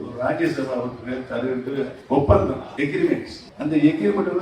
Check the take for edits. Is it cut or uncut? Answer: cut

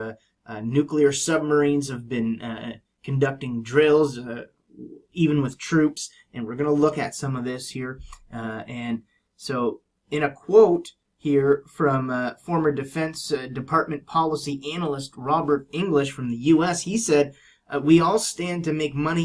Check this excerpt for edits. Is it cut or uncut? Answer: cut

